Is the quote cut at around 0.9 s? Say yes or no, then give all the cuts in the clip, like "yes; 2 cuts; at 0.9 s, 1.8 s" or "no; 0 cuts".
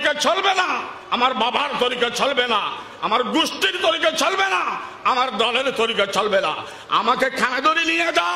yes; 1 cut; at 0.9 s